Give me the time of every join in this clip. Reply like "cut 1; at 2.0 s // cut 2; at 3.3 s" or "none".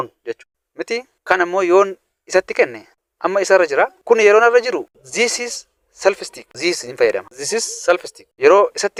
none